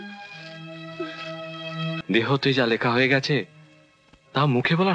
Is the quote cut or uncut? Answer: cut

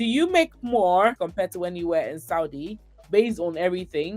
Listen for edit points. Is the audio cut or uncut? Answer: cut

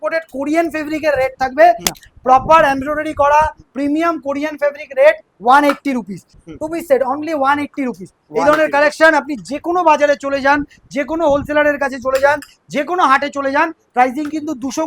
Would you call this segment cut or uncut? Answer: cut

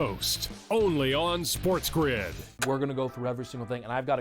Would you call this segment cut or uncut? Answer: cut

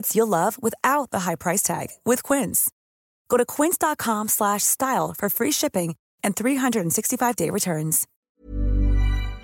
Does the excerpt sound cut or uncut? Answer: cut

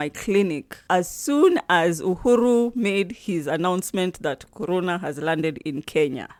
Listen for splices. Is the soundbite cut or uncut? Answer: uncut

